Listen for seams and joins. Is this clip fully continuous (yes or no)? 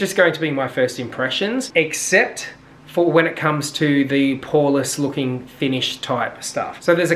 yes